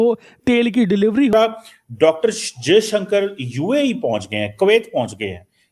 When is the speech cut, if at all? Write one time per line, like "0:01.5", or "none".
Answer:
0:01.3